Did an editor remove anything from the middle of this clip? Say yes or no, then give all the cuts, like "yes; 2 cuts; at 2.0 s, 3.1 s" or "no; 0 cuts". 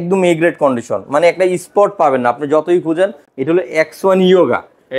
yes; 1 cut; at 3.3 s